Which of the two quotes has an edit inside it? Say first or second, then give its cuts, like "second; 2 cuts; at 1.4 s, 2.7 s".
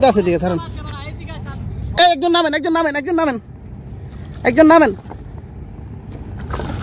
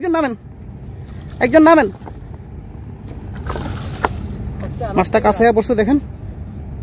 first; 1 cut; at 2.0 s